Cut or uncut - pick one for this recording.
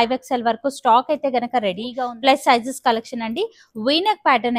cut